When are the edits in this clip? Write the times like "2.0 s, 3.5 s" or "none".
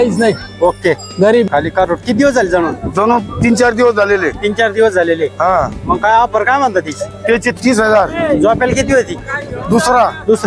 1.5 s